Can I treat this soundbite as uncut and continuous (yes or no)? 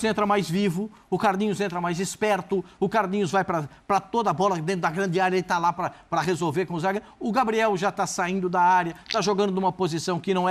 yes